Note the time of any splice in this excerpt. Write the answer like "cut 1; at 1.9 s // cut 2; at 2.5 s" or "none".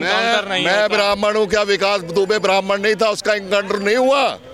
none